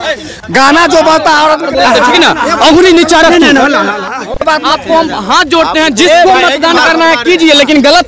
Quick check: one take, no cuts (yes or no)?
yes